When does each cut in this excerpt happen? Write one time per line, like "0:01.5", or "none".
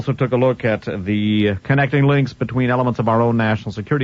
0:02.2